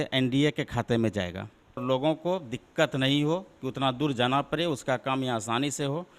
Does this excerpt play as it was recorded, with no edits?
no; 1 cut; at 1.8 s

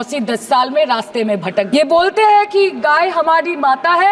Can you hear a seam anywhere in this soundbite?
yes; 1 cut; at 1.7 s

